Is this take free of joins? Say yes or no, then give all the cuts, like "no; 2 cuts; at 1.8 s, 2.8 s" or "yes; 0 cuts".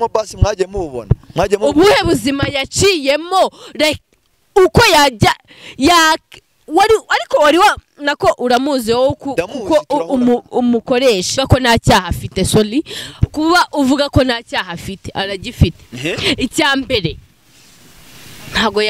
no; 1 cut; at 11.4 s